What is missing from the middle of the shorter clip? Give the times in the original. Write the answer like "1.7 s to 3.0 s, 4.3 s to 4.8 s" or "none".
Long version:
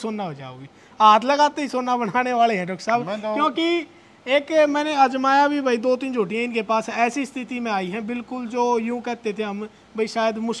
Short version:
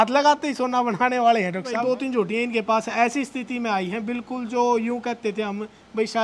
2.9 s to 5.8 s